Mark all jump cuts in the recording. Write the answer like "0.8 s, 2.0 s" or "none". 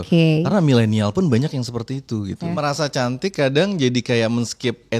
2.5 s